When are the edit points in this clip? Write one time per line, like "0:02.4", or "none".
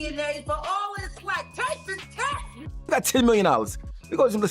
0:02.9